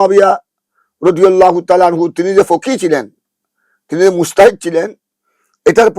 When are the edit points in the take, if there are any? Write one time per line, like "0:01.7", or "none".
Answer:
none